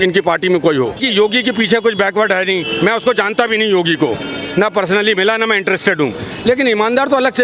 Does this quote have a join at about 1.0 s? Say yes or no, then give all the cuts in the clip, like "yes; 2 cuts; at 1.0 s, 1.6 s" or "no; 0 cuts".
yes; 1 cut; at 1.0 s